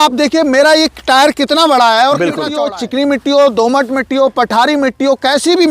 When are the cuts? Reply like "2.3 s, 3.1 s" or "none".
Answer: 2.5 s